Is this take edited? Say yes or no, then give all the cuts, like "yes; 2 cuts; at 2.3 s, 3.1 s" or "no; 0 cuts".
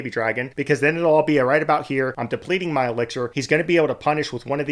yes; 2 cuts; at 2.2 s, 3.4 s